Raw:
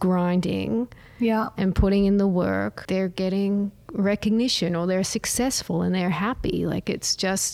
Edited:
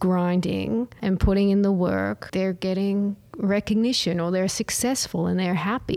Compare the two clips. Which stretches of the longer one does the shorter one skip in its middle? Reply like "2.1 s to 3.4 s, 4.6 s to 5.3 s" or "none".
1.0 s to 1.5 s